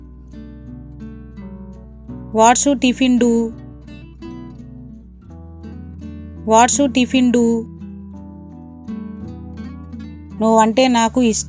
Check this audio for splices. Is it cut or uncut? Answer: uncut